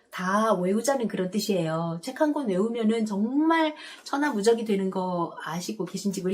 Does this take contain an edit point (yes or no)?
no